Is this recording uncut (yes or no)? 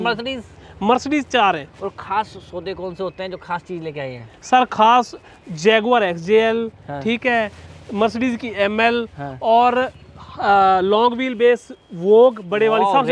yes